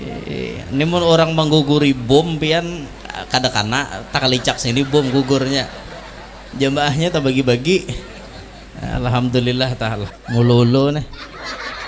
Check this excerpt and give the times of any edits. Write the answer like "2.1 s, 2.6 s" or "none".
10.0 s